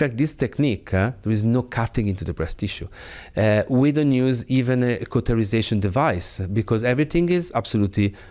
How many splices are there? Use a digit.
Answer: 0